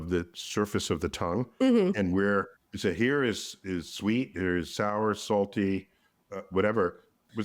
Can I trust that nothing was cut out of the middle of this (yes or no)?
yes